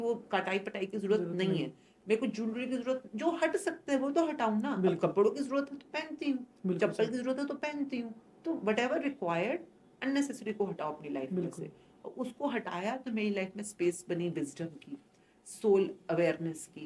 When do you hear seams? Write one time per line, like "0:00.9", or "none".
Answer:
none